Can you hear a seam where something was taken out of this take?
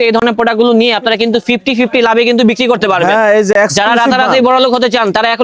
no; 0 cuts

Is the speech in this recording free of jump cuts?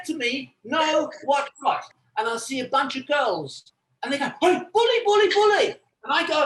no; 1 cut; at 1.9 s

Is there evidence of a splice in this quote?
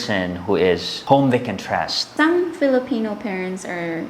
yes; 1 cut; at 2.0 s

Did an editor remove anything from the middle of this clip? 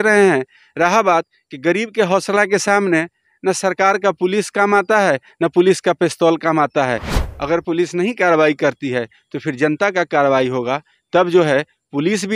yes; 1 cut; at 7.2 s

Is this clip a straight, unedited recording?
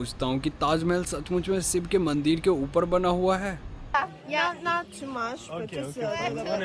no; 1 cut; at 3.8 s

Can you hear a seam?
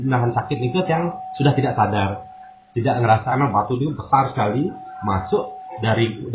yes; 1 cut; at 3.2 s

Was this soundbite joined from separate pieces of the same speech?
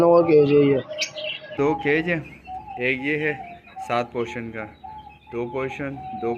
yes; 1 cut; at 1.5 s

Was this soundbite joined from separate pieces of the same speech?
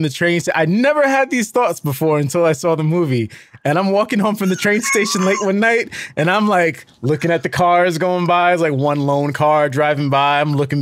no; 0 cuts

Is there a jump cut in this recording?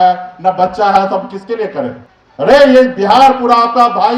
yes; 1 cut; at 2.5 s

